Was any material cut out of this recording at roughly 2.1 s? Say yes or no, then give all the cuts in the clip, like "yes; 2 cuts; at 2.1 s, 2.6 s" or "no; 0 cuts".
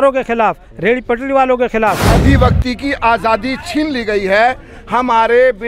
yes; 1 cut; at 2.1 s